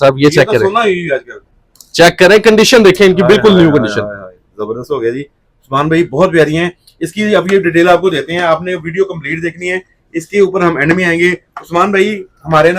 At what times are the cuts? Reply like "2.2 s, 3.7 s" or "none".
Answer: none